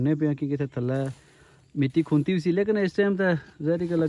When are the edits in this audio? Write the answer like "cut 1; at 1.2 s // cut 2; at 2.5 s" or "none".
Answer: none